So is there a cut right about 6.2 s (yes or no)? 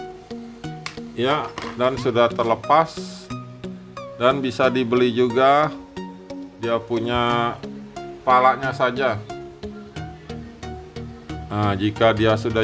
no